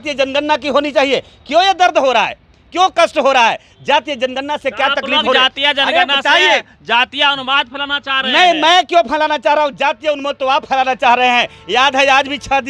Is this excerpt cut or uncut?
uncut